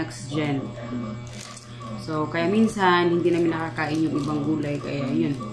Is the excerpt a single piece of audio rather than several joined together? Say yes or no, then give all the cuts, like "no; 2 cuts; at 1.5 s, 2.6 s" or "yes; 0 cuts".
yes; 0 cuts